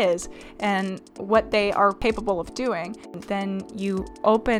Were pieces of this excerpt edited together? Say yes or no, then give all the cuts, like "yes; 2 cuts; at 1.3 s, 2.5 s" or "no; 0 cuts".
yes; 2 cuts; at 2.0 s, 3.2 s